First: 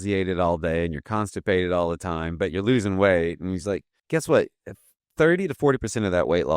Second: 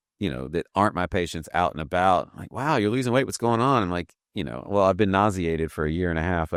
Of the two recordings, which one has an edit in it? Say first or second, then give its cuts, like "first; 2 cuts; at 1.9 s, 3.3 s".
first; 1 cut; at 3.9 s